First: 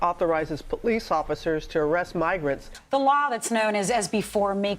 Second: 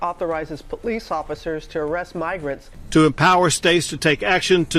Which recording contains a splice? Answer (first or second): first